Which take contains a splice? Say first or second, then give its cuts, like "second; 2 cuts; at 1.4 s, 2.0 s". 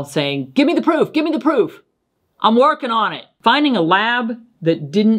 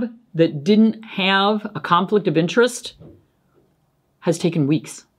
first; 1 cut; at 3.2 s